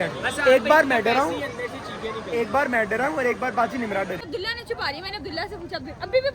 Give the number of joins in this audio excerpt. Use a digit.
1